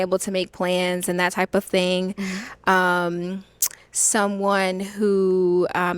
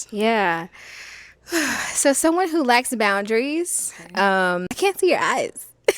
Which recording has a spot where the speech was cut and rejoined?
second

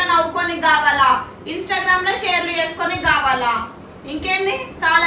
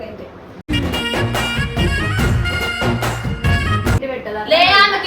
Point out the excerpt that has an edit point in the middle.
second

